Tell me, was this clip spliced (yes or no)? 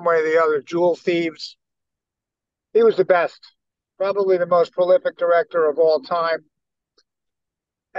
no